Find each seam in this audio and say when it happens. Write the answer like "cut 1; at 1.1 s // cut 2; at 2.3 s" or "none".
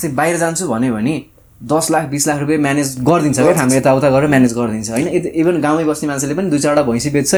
none